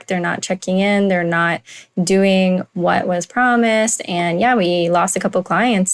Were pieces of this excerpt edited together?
no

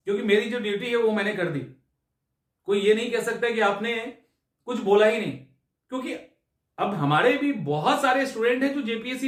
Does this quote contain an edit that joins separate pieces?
no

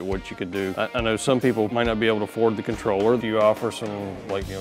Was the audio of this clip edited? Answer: yes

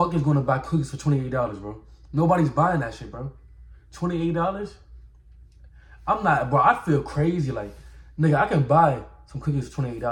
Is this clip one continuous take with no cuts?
yes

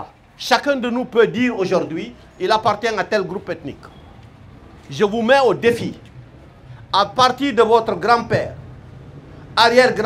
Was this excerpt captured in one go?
yes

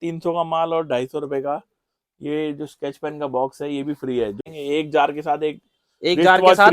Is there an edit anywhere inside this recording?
yes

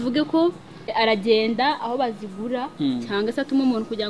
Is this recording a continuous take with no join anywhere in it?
no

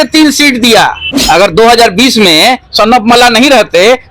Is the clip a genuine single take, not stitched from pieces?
no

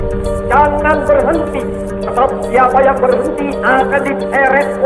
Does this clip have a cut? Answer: no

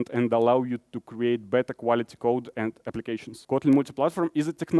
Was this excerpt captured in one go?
no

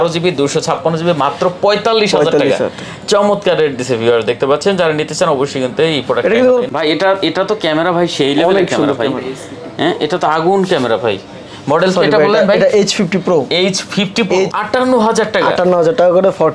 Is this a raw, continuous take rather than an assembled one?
no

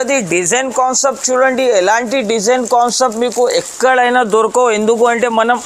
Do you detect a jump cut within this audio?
no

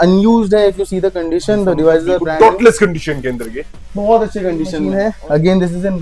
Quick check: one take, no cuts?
no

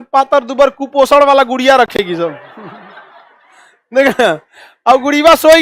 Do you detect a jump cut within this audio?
no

